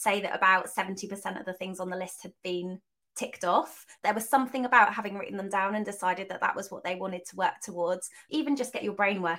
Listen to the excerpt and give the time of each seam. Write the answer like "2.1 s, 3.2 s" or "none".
4.0 s, 8.2 s